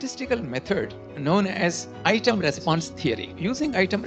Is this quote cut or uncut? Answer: cut